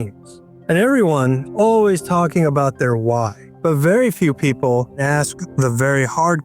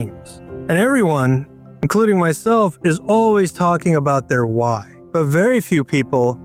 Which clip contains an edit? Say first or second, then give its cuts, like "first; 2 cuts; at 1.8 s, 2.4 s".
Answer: first; 2 cuts; at 1.5 s, 5.0 s